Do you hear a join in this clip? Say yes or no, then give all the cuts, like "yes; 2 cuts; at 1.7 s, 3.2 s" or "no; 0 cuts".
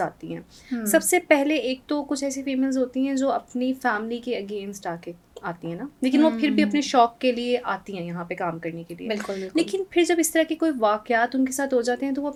no; 0 cuts